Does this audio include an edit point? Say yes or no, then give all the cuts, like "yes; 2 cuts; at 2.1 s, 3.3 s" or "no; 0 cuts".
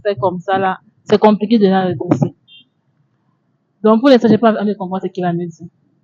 no; 0 cuts